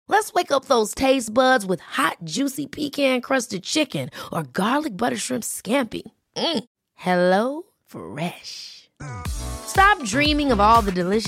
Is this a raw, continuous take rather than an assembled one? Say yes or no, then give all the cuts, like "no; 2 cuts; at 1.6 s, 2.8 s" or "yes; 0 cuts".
yes; 0 cuts